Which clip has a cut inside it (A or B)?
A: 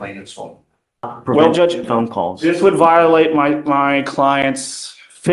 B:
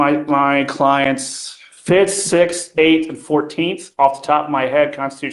A